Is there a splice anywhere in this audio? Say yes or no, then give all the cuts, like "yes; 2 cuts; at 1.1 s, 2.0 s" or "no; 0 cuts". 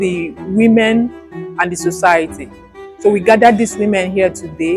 no; 0 cuts